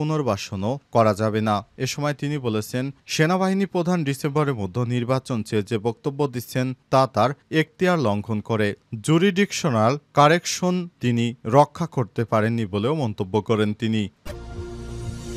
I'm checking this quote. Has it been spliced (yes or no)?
yes